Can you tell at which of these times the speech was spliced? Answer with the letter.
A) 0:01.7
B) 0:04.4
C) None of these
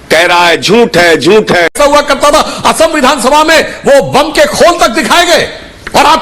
A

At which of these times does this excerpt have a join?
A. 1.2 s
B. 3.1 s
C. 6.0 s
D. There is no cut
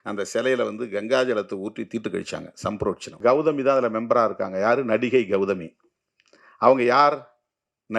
B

